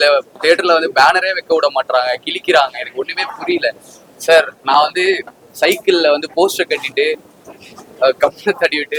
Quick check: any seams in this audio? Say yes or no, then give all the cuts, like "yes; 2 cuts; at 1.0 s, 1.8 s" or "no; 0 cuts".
no; 0 cuts